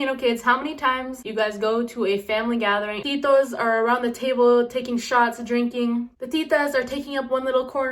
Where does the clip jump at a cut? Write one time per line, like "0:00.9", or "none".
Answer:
0:03.0